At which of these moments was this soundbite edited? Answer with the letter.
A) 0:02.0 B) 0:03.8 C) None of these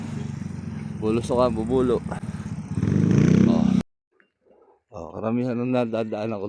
B